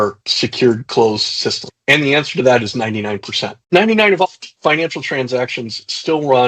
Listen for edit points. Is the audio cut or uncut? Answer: uncut